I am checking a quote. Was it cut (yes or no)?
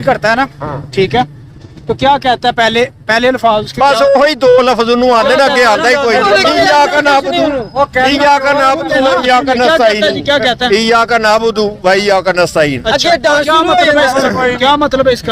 no